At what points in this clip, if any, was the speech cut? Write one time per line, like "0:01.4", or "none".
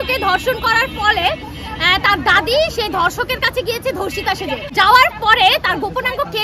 0:04.7